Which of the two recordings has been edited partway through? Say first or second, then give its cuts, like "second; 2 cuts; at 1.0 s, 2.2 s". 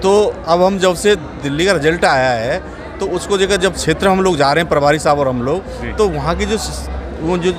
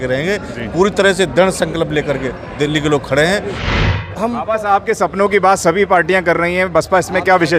second; 1 cut; at 3.9 s